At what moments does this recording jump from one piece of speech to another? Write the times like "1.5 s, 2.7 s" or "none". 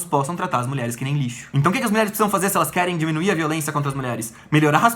1.4 s